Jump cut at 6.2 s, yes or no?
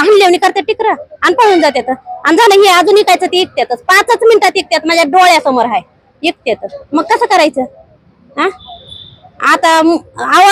no